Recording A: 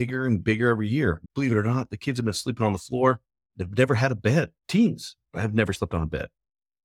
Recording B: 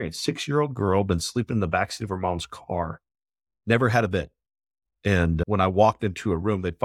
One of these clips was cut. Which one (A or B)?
A